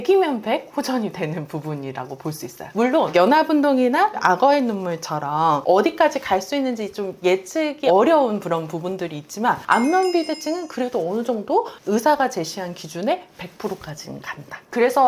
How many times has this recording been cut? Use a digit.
0